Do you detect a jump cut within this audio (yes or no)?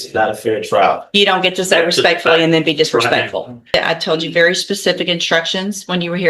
yes